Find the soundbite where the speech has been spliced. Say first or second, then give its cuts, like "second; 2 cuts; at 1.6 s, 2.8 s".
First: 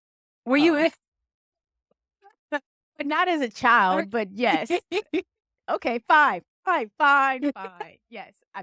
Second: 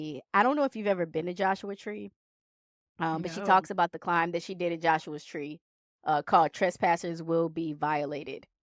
first; 1 cut; at 5.5 s